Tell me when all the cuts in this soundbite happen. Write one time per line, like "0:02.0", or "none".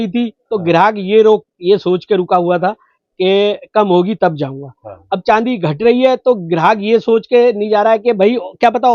none